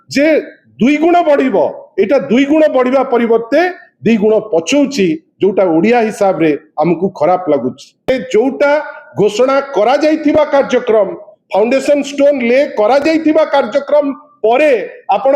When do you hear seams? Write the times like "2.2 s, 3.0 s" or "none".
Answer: 7.9 s